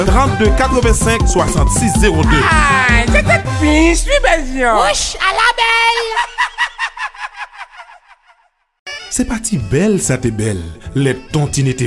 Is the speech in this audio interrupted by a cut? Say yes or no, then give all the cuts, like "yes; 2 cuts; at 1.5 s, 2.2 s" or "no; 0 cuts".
yes; 1 cut; at 1.7 s